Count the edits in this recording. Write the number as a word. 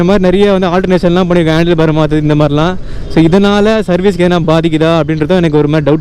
zero